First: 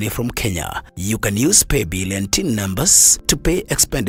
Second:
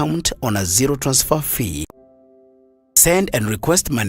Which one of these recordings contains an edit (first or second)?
second